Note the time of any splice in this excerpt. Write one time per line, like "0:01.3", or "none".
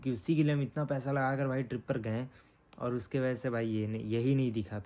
none